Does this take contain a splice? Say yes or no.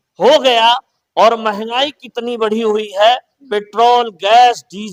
no